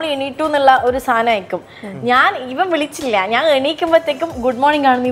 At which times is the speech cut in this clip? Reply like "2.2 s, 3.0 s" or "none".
none